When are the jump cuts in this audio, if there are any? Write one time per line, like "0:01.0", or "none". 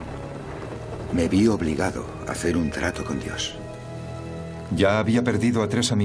0:04.7